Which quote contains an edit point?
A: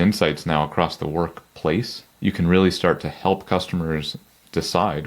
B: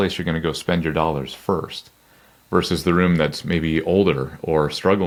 A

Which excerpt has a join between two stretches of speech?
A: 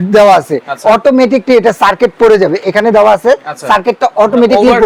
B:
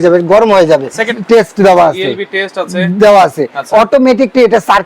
B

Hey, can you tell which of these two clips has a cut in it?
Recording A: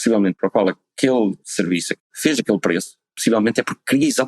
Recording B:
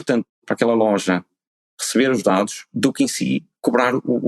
A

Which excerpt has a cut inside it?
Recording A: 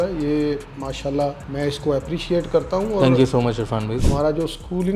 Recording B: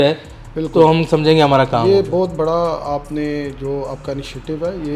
A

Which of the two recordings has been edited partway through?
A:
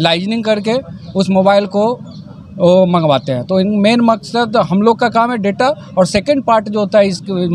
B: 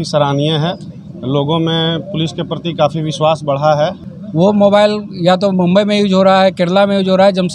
B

